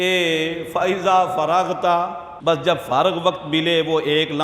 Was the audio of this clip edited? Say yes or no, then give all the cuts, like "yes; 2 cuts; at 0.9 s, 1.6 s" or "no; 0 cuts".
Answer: yes; 1 cut; at 2.2 s